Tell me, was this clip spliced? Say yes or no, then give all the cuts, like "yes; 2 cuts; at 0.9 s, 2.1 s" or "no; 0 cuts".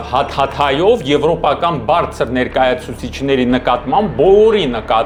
no; 0 cuts